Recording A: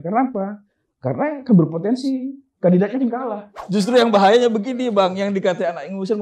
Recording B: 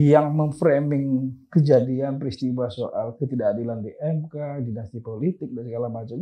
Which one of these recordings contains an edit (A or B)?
A